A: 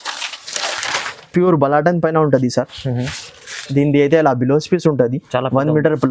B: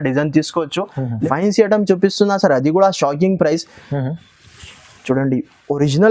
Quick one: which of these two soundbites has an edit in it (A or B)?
B